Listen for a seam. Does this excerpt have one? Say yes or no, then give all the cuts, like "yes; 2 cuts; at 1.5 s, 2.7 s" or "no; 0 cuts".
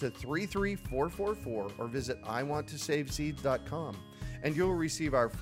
no; 0 cuts